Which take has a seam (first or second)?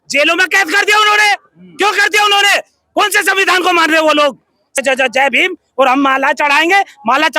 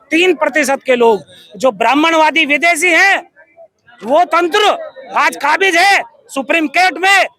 first